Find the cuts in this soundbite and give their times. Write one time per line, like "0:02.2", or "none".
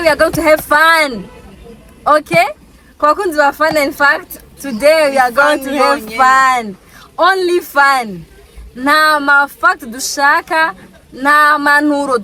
none